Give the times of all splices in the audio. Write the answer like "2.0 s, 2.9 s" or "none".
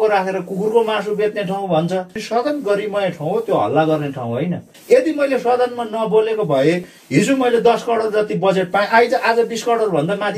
2.2 s, 4.7 s, 6.9 s